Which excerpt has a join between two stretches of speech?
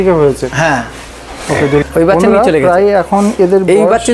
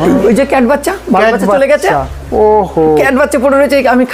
first; 1 cut; at 1.8 s

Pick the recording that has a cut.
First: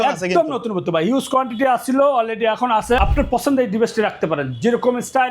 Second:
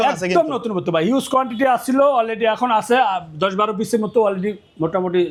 first; 1 cut; at 3.0 s

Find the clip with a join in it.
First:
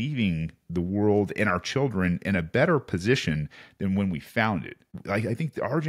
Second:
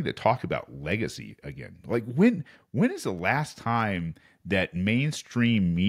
first; 1 cut; at 4.9 s

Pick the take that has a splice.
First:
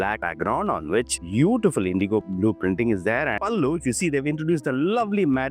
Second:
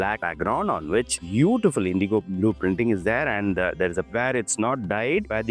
first; 1 cut; at 3.4 s

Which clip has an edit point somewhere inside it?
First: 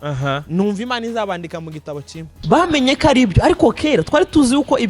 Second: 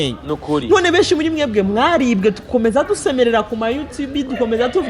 first; 1 cut; at 2.3 s

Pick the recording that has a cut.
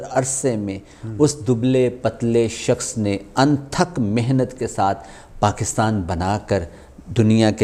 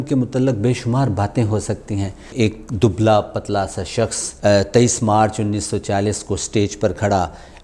second; 2 cuts; at 2.3 s, 4.2 s

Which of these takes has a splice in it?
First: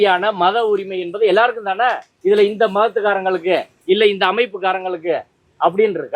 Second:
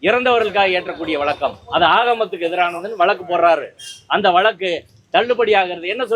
first; 1 cut; at 2.1 s

